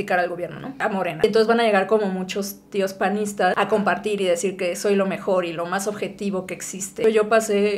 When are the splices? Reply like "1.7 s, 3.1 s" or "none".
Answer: 0.9 s, 3.5 s, 7.0 s